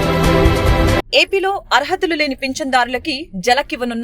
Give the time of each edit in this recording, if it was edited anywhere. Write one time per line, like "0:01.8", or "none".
0:01.0